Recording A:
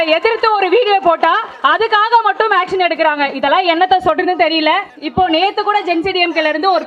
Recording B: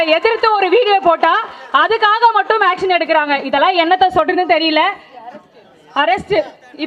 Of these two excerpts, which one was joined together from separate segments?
A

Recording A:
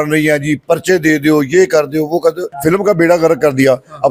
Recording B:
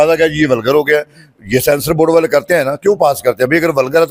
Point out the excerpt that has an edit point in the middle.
A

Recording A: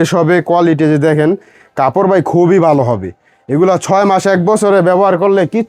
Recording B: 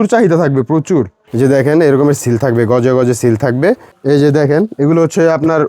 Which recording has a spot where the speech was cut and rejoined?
B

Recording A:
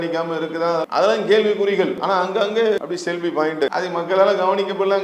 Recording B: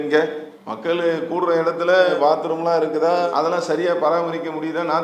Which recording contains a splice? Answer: A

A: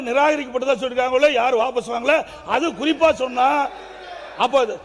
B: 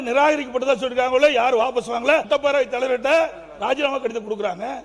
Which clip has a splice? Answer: B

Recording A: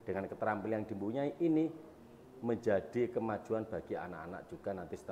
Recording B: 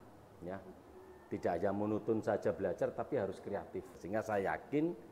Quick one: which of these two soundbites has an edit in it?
B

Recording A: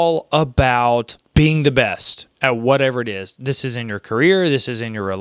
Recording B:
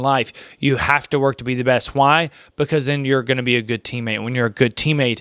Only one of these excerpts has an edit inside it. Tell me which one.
A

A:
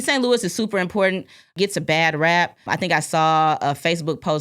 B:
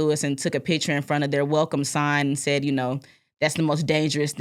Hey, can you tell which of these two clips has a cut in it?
A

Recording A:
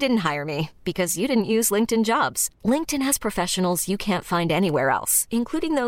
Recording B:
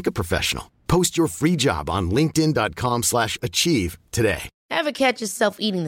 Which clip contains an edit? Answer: B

